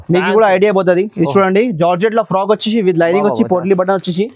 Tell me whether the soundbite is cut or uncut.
uncut